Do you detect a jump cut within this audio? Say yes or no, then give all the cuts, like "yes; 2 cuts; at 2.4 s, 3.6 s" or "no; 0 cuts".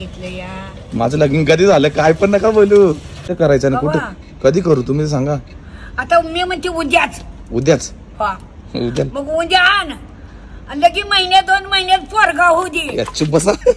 yes; 1 cut; at 3.2 s